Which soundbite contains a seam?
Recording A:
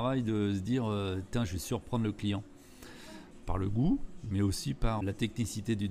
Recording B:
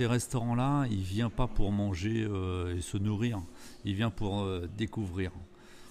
A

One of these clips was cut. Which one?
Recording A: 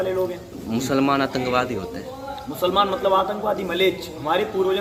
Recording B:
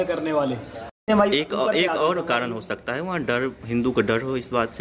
B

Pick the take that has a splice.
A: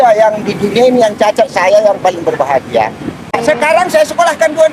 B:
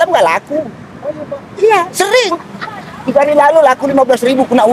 A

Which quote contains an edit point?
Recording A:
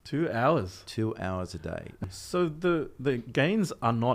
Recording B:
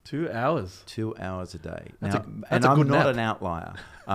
A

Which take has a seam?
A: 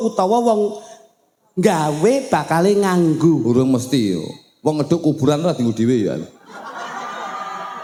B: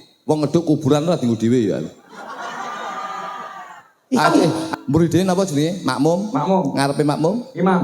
B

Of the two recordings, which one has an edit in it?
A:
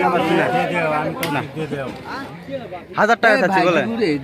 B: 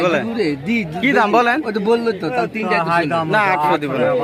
A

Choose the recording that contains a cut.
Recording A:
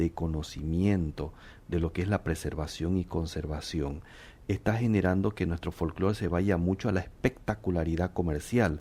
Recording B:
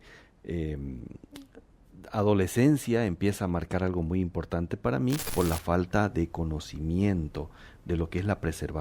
B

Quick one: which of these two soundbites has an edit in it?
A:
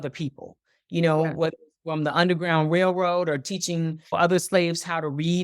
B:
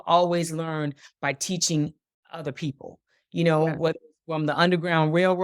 A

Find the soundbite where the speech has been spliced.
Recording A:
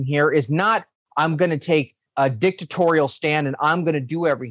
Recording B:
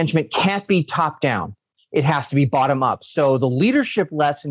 A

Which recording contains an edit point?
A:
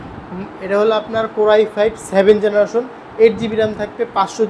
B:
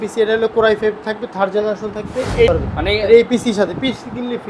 B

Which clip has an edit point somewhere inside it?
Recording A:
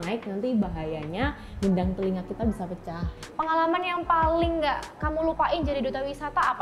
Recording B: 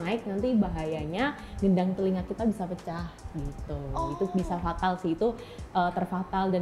A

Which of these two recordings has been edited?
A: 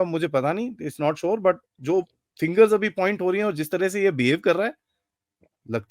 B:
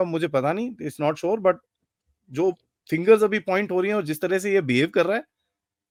A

